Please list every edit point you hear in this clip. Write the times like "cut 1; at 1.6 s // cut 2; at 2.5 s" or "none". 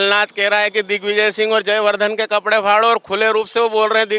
none

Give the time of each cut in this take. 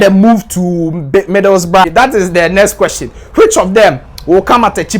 cut 1; at 1.8 s

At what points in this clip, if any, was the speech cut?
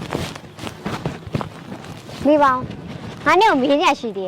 cut 1; at 2.2 s

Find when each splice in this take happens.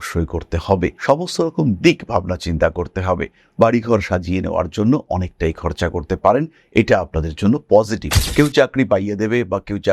cut 1; at 8.2 s

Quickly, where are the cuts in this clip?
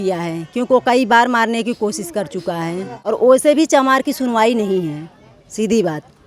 cut 1; at 3.1 s

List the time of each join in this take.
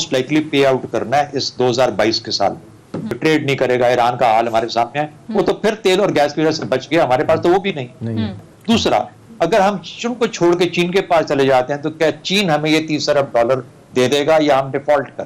cut 1; at 3.2 s // cut 2; at 8.4 s

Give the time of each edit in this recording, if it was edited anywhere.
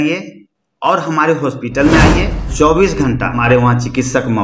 cut 1; at 2.5 s // cut 2; at 3.4 s

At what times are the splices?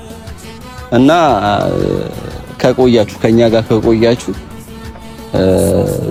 none

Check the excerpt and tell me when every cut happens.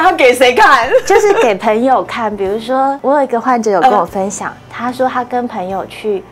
cut 1; at 3.0 s

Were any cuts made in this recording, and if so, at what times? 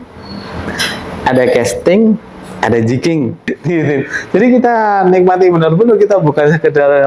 cut 1; at 3.5 s

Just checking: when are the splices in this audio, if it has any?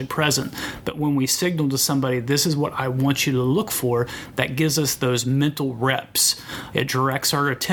cut 1; at 6.6 s

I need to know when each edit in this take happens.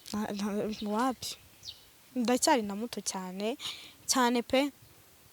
none

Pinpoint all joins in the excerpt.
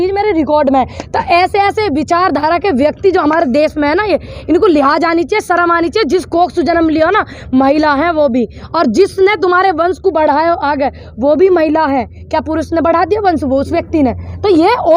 none

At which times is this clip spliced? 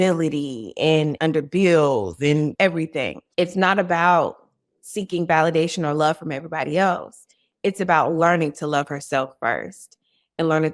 cut 1; at 1.1 s // cut 2; at 2.8 s

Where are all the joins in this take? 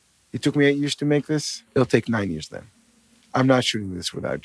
cut 1; at 1.6 s

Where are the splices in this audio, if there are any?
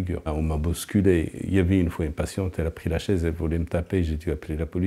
none

